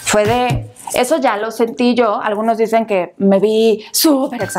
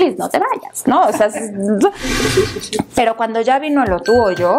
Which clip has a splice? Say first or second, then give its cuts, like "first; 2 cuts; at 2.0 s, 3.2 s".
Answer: second; 1 cut; at 2.1 s